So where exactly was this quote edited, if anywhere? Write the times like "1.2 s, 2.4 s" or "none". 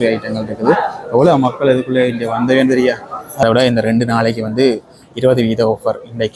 3.4 s